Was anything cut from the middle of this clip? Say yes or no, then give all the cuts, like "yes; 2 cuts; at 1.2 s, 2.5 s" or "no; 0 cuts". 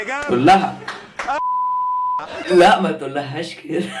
yes; 1 cut; at 2.4 s